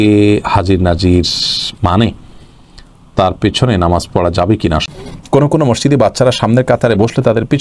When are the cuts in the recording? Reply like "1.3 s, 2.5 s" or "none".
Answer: 4.8 s